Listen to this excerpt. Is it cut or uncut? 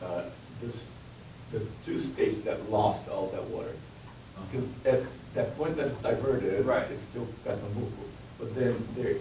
cut